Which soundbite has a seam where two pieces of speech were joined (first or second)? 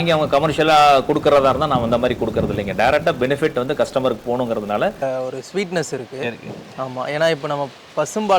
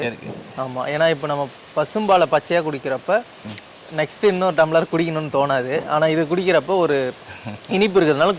first